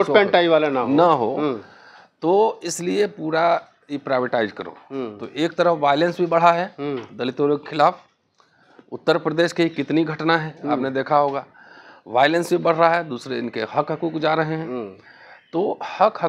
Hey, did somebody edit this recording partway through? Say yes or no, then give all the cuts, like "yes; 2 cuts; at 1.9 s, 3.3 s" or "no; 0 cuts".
no; 0 cuts